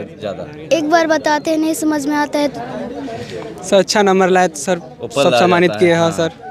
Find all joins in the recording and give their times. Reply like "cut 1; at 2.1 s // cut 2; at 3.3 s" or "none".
cut 1; at 2.6 s